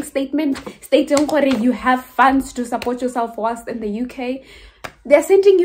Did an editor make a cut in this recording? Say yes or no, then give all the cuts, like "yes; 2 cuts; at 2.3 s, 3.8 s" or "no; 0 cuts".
no; 0 cuts